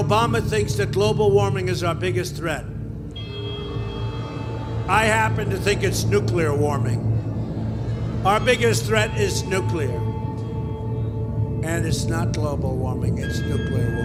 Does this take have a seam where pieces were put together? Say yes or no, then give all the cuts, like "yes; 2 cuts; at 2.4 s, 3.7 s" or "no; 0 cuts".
no; 0 cuts